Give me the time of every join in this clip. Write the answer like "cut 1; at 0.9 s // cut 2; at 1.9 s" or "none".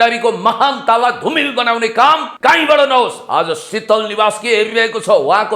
cut 1; at 2.3 s